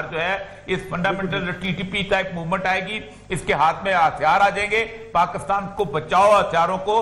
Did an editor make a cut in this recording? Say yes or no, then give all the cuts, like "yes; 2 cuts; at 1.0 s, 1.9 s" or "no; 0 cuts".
no; 0 cuts